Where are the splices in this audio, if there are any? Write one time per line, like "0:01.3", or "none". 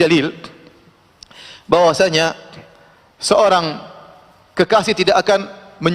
none